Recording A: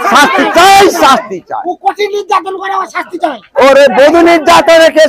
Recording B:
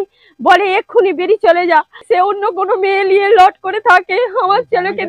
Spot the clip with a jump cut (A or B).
B